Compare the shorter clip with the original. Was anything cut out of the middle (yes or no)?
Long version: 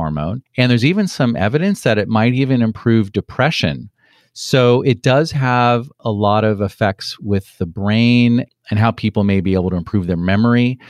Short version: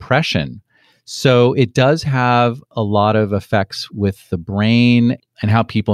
no